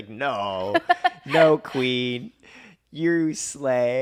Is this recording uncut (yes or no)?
yes